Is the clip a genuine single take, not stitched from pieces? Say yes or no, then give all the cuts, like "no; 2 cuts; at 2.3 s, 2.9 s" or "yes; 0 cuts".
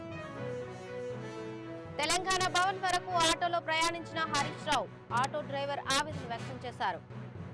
no; 1 cut; at 1.1 s